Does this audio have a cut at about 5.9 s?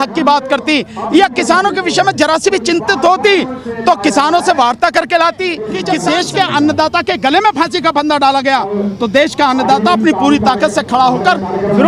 yes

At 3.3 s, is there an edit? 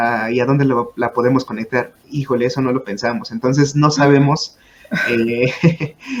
no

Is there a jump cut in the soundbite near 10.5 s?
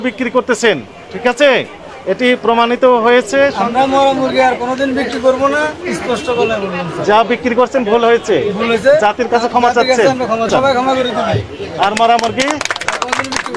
yes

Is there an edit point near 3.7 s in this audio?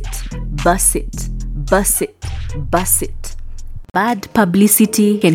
yes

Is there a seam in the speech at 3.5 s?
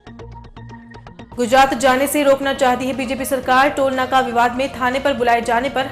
no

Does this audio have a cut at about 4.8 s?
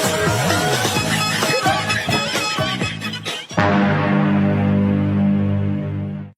no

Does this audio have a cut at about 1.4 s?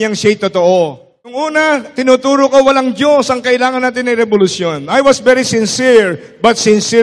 yes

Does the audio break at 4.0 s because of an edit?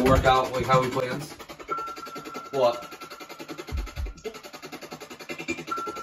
no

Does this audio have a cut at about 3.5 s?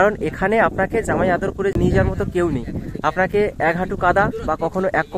no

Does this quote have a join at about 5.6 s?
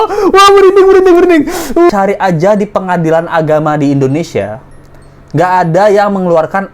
no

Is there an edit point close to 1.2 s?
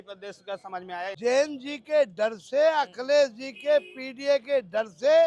yes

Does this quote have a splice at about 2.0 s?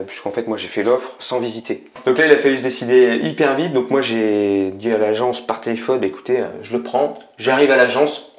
yes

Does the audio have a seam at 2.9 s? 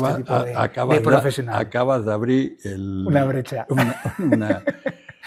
no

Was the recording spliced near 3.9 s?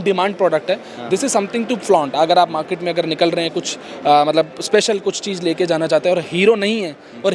no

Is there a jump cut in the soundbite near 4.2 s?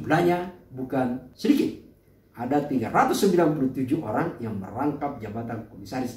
no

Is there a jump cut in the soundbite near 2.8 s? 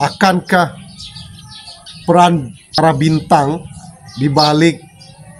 yes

